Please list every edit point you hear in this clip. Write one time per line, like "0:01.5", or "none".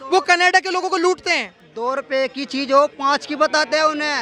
none